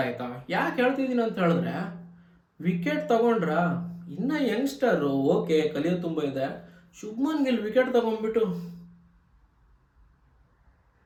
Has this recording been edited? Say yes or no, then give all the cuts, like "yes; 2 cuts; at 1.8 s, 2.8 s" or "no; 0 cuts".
no; 0 cuts